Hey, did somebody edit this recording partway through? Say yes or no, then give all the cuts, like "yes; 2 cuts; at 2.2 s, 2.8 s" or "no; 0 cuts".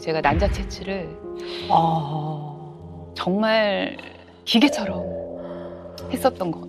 no; 0 cuts